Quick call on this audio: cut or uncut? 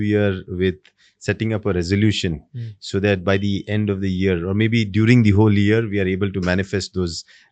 uncut